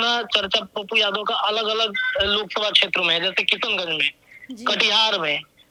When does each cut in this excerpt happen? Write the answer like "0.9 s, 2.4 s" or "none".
none